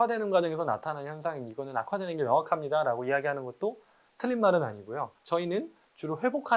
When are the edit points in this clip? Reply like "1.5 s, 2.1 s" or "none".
5.2 s